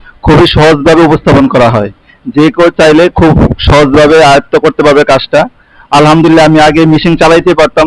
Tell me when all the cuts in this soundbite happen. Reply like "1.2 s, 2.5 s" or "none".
none